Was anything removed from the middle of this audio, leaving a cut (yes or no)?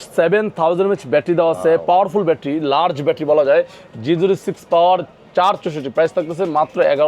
no